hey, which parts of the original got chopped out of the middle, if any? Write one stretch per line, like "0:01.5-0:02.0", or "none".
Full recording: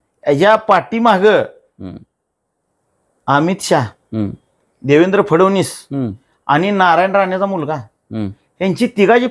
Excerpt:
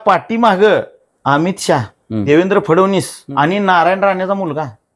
0:01.6-0:03.0
0:04.3-0:04.9
0:05.8-0:06.3

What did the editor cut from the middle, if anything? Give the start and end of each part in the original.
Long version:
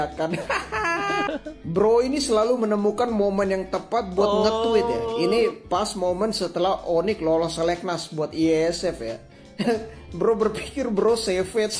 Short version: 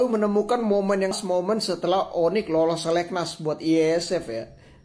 0:03.7-0:05.9

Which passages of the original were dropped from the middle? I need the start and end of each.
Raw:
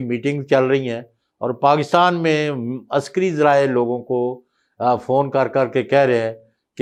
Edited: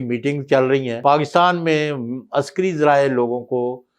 0:01.0-0:01.6

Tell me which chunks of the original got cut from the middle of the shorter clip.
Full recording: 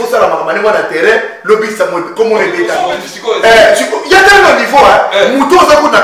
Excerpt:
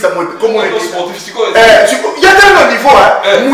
0:02.7-0:02.9

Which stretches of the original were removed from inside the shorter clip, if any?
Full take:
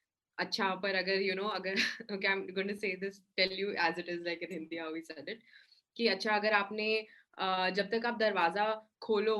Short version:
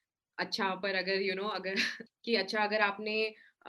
0:02.0-0:05.7

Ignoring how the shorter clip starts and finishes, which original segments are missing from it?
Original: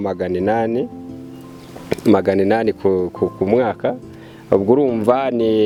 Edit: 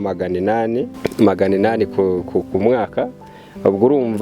0:00.9-0:01.8

